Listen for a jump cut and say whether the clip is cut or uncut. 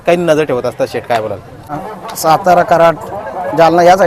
cut